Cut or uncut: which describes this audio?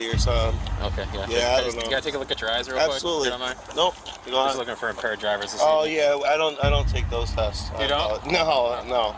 uncut